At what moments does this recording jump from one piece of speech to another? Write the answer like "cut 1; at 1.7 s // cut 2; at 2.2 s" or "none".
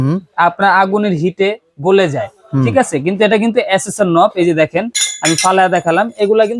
none